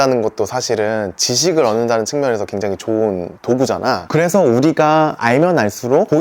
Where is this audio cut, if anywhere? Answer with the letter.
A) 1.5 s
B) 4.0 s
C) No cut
B